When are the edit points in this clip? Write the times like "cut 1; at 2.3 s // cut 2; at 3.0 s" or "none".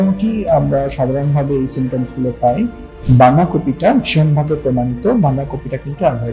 cut 1; at 2.9 s